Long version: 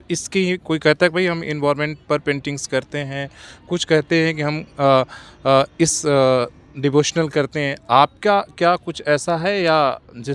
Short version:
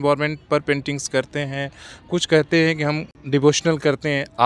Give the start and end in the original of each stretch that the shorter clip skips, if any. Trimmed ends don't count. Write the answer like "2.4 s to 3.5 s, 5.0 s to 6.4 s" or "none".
4.7 s to 6.6 s